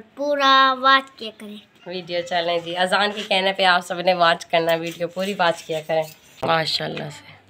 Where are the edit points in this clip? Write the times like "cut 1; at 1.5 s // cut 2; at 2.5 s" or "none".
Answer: cut 1; at 6.4 s